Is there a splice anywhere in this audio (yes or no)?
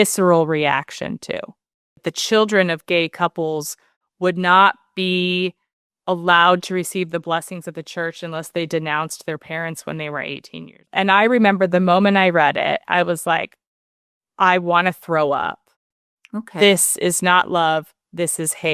yes